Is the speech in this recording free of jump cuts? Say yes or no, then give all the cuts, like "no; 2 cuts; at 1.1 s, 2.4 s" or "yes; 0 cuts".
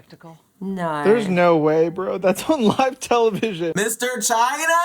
no; 1 cut; at 3.7 s